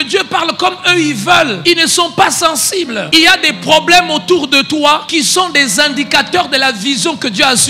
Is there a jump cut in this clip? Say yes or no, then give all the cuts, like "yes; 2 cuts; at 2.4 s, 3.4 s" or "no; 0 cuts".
yes; 3 cuts; at 1.6 s, 3.1 s, 5.1 s